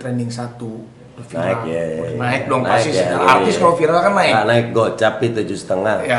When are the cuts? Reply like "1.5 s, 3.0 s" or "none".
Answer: none